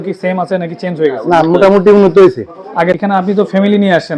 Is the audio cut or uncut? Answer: cut